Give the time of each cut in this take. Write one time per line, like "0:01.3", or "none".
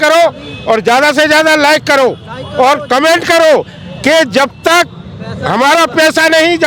none